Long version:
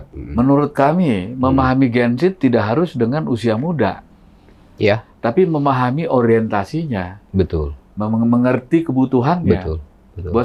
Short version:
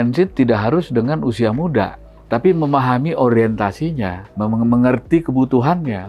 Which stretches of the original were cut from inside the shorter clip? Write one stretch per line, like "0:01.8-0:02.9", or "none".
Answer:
0:04.2-0:05.1
0:07.1-0:07.8